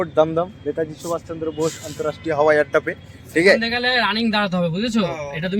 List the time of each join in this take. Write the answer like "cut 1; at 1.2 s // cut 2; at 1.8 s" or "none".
cut 1; at 3.7 s